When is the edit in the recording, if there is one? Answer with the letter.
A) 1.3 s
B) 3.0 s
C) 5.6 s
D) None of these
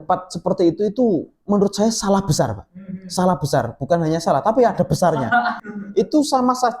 C